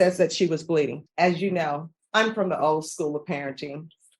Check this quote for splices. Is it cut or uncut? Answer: cut